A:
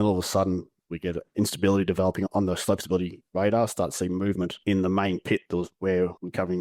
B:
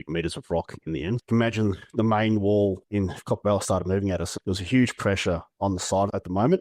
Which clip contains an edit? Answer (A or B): B